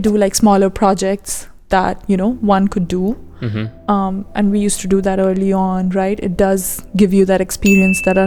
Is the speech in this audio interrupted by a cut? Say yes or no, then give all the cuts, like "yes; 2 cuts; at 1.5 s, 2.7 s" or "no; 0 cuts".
no; 0 cuts